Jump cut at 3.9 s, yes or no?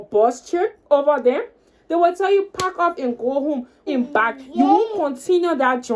yes